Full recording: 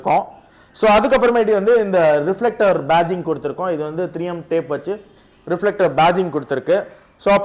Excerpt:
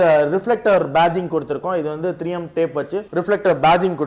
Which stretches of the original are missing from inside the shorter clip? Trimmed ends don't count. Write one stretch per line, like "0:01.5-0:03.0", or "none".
0:05.0-0:05.4